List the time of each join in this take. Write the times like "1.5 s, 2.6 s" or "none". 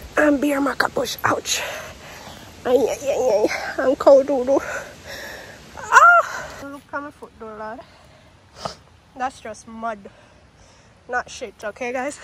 6.6 s